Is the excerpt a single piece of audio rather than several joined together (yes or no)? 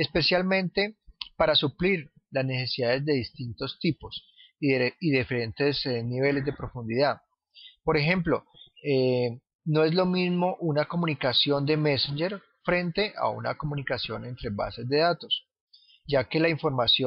yes